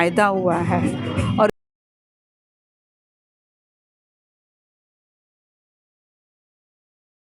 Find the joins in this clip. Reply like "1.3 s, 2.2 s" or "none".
none